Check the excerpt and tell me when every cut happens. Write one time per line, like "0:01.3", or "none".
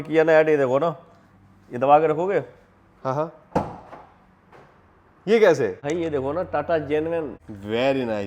0:05.8
0:07.4